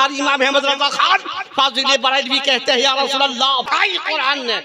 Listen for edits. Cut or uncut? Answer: cut